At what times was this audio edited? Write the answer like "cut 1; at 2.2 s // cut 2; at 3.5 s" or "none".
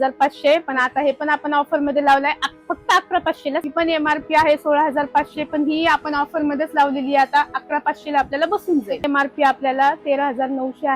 cut 1; at 3.6 s // cut 2; at 9.1 s